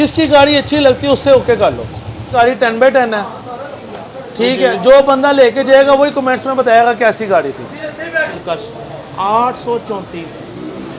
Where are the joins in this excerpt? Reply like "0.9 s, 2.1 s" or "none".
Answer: 2.3 s, 8.3 s